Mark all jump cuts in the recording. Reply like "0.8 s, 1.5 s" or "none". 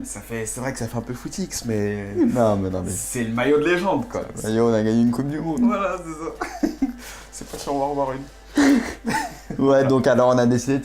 4.0 s